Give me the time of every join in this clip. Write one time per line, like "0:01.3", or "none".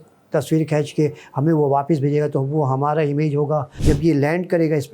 0:03.7